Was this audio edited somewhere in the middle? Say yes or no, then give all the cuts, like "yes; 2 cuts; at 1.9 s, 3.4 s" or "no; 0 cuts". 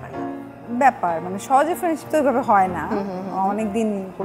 no; 0 cuts